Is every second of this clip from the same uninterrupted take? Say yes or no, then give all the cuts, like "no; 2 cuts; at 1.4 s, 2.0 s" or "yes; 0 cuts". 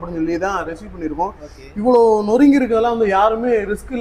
yes; 0 cuts